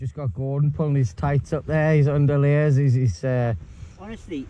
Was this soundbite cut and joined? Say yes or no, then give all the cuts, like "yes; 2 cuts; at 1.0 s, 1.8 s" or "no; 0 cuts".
no; 0 cuts